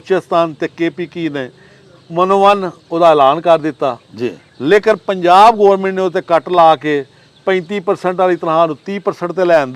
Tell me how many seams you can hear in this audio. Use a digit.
0